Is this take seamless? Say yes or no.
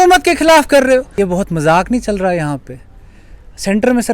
no